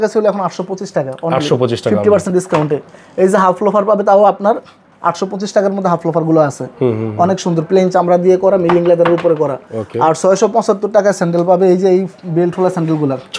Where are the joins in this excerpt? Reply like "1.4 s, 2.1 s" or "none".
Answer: none